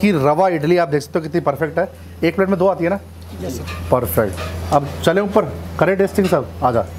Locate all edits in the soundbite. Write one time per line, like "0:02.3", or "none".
none